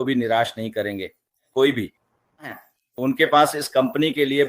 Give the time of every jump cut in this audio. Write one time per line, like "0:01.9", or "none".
0:02.5

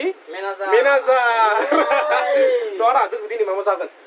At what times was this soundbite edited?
none

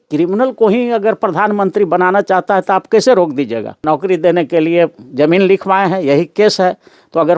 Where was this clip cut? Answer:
0:03.8

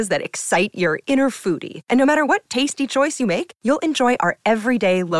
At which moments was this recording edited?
none

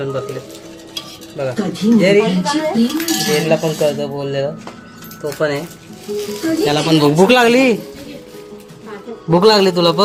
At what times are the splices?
none

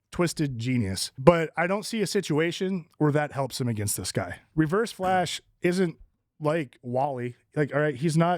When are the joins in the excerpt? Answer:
0:01.1
0:04.4

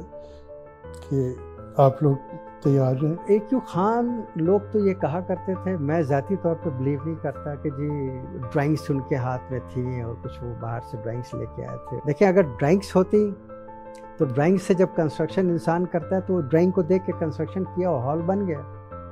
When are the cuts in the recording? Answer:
0:03.2
0:12.0

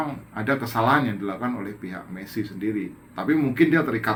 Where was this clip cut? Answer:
none

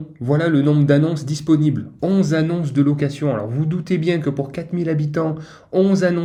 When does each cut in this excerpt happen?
none

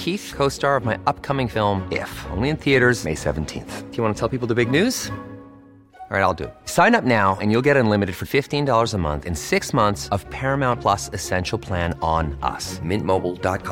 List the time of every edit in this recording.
none

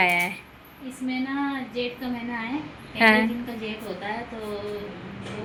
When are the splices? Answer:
none

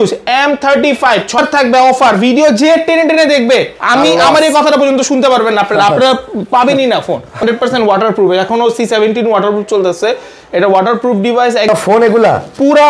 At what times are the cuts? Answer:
0:01.4
0:07.4
0:11.7

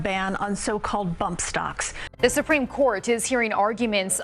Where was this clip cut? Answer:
0:01.9

